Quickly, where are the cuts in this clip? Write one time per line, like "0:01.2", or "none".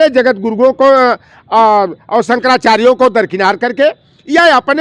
none